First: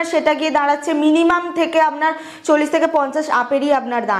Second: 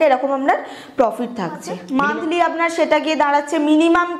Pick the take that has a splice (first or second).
second